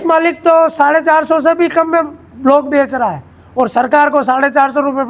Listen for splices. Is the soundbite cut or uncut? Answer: uncut